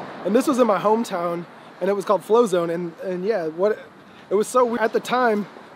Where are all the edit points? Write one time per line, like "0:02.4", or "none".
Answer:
0:04.7